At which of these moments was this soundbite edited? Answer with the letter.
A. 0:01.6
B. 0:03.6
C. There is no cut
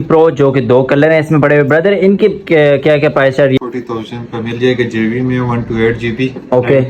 B